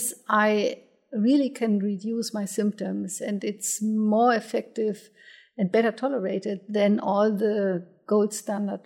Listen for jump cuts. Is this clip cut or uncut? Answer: uncut